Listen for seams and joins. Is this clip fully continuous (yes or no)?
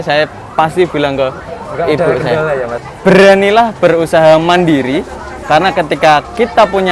no